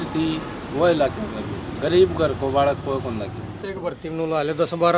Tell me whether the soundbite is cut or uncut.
cut